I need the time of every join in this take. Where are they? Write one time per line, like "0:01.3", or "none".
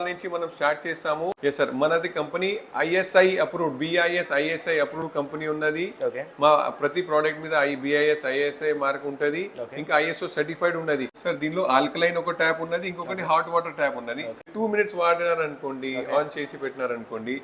0:01.4
0:11.1
0:14.4